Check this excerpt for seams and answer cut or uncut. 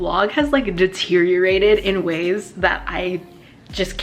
uncut